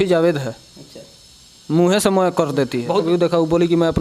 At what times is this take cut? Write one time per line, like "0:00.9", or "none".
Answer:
0:03.0

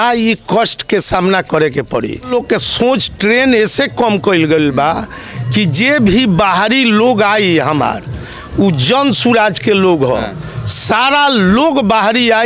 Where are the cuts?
0:02.3

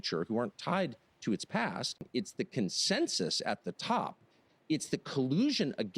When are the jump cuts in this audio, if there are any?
0:02.0

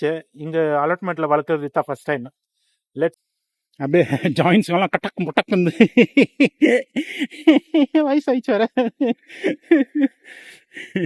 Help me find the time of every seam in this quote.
0:03.1

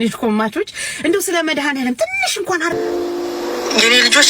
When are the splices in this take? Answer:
0:02.8

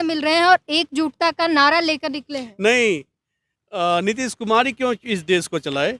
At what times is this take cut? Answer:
none

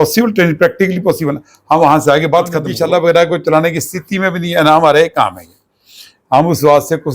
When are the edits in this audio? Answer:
0:02.6

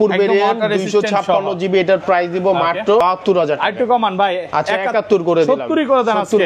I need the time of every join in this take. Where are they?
0:03.0

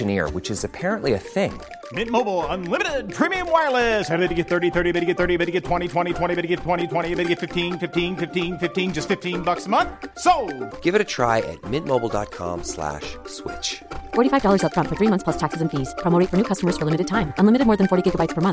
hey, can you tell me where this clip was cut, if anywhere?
none

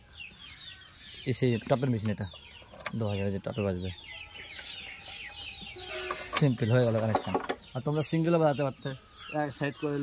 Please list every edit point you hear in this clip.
none

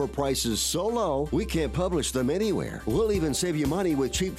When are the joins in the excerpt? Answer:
none

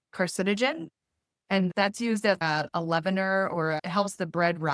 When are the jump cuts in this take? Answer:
0:02.4
0:03.8

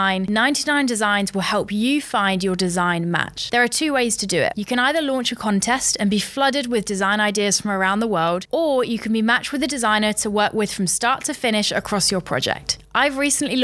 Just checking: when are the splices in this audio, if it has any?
none

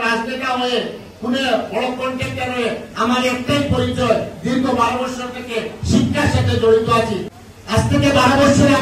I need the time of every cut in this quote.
0:07.3

